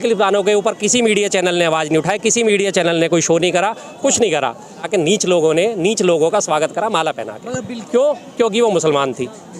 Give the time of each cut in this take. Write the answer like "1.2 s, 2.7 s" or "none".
4.8 s, 7.7 s